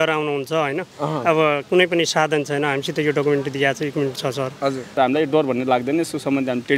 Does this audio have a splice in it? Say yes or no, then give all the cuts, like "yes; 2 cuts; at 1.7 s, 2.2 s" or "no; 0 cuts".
yes; 1 cut; at 4.9 s